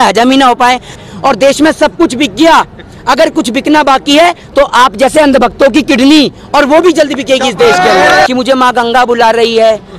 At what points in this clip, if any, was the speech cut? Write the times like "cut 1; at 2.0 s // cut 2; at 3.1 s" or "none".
cut 1; at 1.0 s // cut 2; at 8.3 s